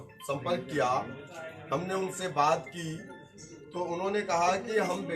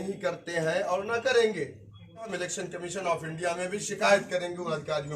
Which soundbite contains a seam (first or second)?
second